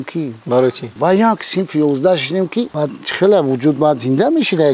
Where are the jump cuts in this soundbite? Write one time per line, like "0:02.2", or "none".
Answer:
0:00.9
0:02.7